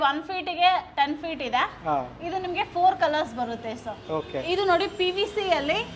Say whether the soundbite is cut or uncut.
cut